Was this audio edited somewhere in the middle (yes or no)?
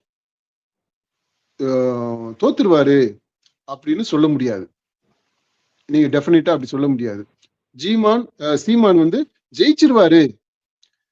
no